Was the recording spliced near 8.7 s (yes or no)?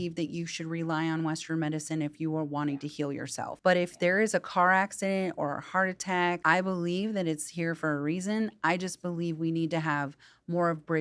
no